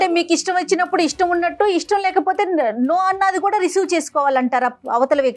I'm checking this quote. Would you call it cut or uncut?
uncut